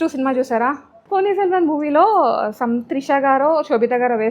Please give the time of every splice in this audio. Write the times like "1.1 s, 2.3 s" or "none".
1.0 s